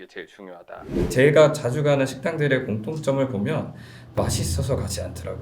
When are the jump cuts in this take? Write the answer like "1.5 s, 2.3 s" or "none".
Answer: 1.1 s